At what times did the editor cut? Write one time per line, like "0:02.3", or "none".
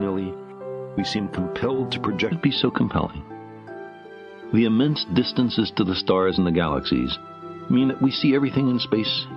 none